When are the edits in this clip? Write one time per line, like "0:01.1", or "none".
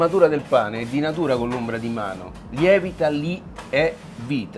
none